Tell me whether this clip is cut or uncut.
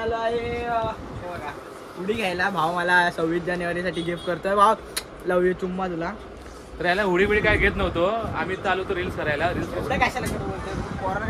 uncut